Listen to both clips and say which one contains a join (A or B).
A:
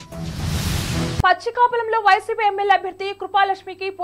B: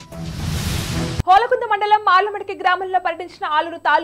A